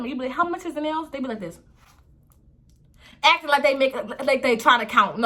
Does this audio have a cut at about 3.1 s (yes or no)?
no